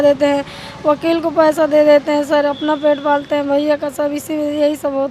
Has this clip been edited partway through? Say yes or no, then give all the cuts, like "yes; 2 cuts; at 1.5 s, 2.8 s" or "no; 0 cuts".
no; 0 cuts